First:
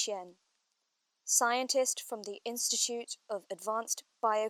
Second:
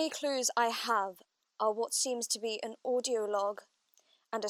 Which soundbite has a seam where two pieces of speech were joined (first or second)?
second